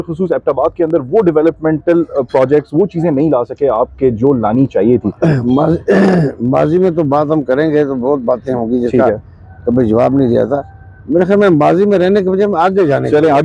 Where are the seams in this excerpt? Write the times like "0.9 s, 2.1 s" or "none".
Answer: none